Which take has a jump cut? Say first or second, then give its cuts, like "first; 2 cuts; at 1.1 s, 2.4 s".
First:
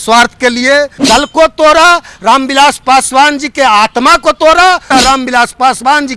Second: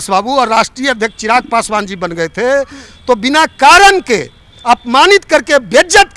first; 2 cuts; at 1.0 s, 4.8 s